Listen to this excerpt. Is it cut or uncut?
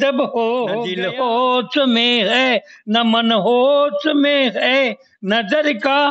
cut